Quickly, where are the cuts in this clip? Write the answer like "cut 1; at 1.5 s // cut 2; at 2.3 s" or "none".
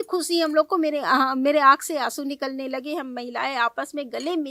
none